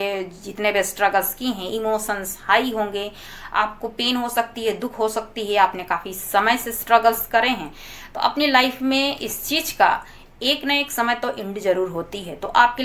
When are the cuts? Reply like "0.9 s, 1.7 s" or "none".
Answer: none